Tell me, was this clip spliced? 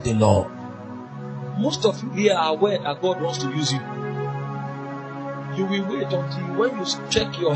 no; 0 cuts

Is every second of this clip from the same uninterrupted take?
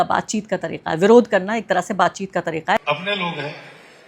no; 1 cut; at 2.8 s

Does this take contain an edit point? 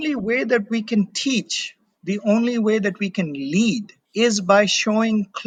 no; 0 cuts

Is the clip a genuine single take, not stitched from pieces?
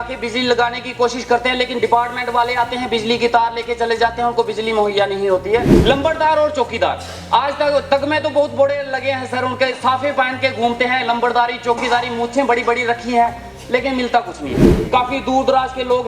no; 2 cuts; at 5.7 s, 14.7 s

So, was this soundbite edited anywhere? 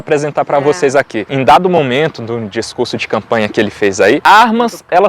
yes; 2 cuts; at 1.3 s, 4.2 s

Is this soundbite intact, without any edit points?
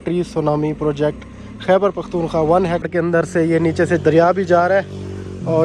no; 1 cut; at 2.9 s

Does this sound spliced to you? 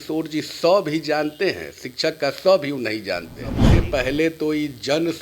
yes; 1 cut; at 3.6 s

